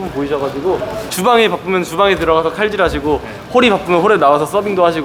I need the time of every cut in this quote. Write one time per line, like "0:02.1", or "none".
none